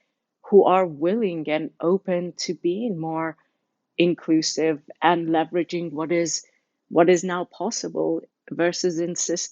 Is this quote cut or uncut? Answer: cut